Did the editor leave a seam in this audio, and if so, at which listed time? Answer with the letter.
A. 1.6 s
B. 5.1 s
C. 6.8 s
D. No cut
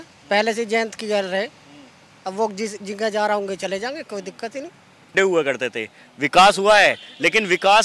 B